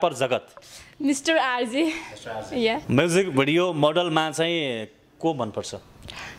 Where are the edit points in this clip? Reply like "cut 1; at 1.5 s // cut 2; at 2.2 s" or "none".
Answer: cut 1; at 2.8 s